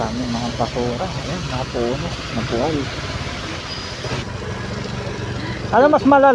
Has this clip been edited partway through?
yes; 1 cut; at 4.2 s

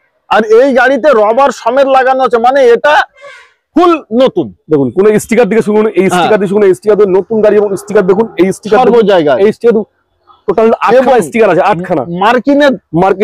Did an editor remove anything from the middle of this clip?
no; 0 cuts

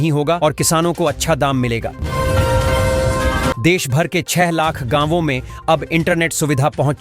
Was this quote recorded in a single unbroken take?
no; 2 cuts; at 2.0 s, 3.6 s

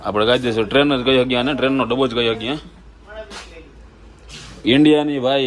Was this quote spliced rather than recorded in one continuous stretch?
no; 0 cuts

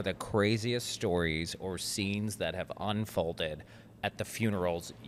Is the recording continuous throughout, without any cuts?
yes; 0 cuts

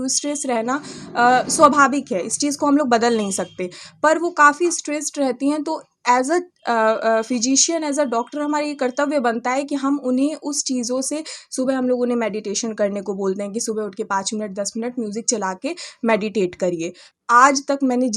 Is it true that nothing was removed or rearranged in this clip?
no; 1 cut; at 17.1 s

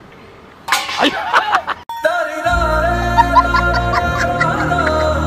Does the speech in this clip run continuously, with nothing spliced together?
yes; 0 cuts

